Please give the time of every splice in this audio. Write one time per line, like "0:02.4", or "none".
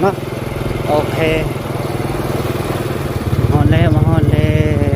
0:03.3